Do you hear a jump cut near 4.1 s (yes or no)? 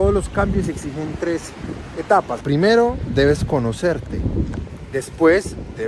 no